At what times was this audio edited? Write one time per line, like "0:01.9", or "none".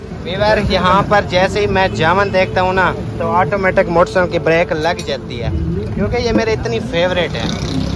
none